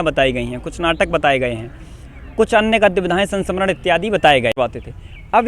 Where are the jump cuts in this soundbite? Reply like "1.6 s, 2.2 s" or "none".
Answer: 4.6 s